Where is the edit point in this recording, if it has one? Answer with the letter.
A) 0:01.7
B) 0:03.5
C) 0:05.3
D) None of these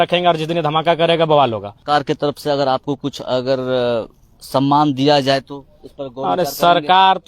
A